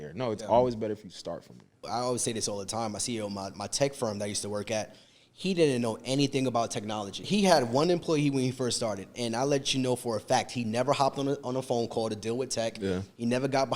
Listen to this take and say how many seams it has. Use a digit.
2